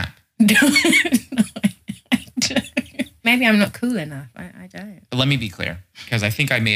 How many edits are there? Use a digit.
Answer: 1